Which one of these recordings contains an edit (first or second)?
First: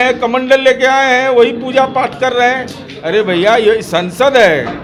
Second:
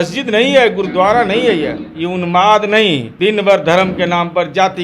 second